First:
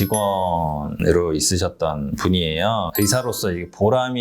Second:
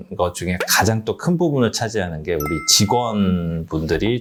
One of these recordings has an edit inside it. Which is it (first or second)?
first